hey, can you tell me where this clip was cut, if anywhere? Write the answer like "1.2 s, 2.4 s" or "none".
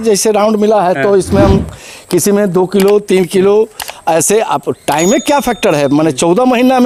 none